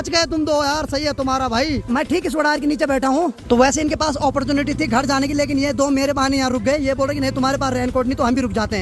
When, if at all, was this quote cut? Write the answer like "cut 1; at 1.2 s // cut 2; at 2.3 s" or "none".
none